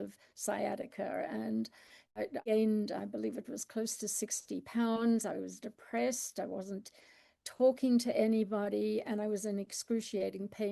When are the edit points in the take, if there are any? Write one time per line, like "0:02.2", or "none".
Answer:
0:02.2